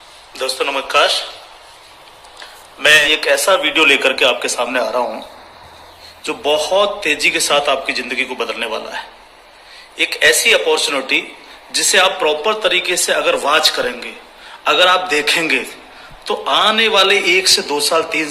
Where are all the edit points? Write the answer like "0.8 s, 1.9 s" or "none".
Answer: 3.0 s